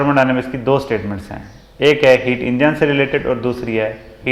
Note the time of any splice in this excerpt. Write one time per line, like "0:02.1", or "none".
none

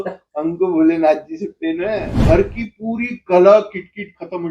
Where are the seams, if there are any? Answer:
0:02.1

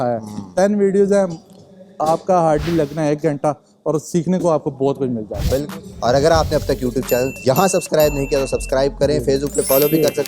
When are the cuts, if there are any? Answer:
0:05.7

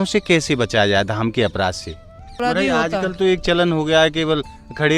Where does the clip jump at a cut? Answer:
0:02.3

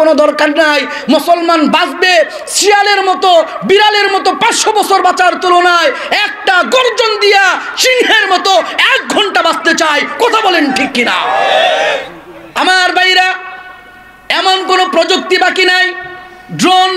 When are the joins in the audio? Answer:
0:12.5

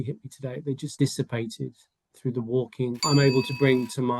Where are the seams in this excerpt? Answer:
0:00.9
0:03.0

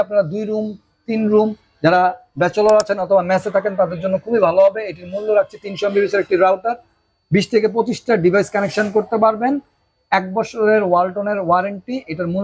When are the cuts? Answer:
none

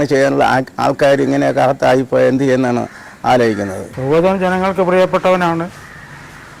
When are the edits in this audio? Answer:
0:03.9

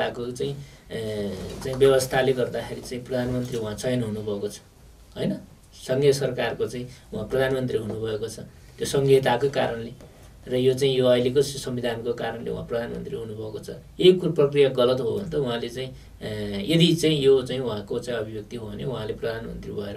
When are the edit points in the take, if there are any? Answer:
none

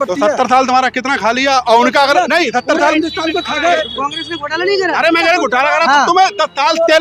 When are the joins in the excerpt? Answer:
0:03.8

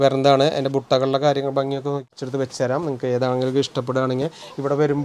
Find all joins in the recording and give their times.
0:02.1

